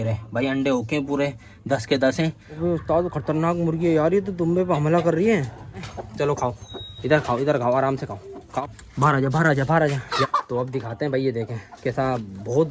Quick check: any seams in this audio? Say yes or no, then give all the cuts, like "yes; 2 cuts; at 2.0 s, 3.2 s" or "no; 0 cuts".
yes; 4 cuts; at 2.7 s, 6.0 s, 8.6 s, 10.2 s